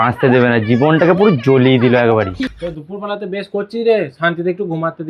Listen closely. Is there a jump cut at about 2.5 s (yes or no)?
yes